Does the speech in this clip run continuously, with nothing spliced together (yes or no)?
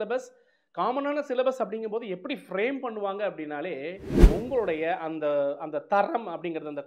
no